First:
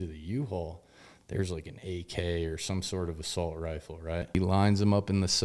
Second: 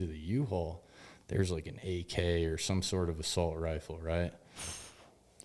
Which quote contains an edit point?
first; 1 cut; at 4.2 s

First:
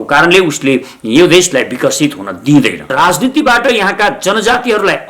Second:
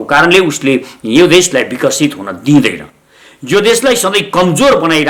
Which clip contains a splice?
first; 1 cut; at 2.9 s

